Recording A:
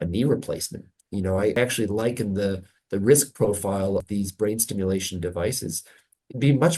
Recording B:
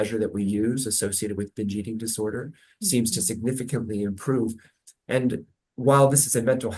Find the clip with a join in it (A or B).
A